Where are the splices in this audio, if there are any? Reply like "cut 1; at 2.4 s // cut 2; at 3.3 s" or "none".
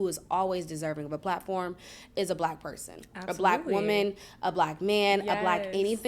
none